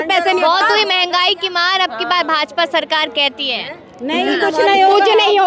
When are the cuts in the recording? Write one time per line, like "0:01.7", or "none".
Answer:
none